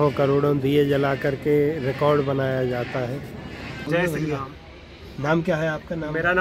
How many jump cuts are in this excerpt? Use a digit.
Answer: 1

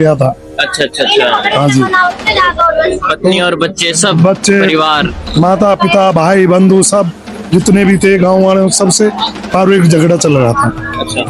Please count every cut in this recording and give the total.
0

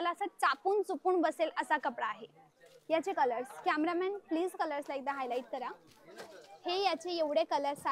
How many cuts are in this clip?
0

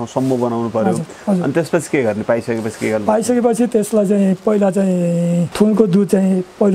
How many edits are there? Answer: 2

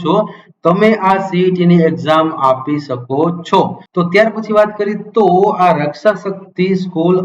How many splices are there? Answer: 0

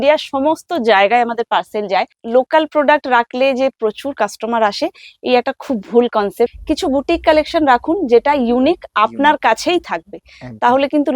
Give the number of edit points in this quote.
2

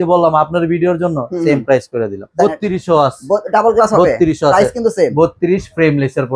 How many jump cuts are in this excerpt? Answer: 1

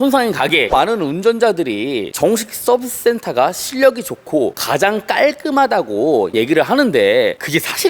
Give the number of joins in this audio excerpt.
2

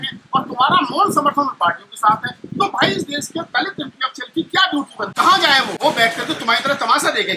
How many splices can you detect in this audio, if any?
2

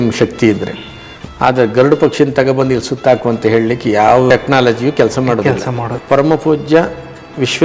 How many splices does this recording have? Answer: 2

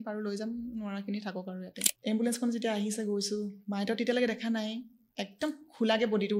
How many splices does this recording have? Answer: 1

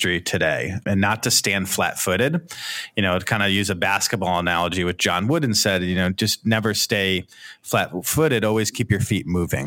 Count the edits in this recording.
1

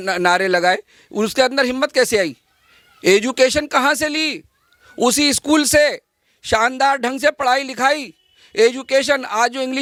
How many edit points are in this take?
0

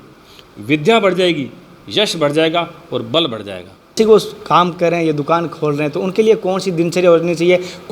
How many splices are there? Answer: 1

